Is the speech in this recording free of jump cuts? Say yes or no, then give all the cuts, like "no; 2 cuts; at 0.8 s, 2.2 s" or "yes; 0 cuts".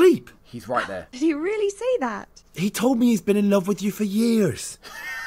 no; 1 cut; at 1.0 s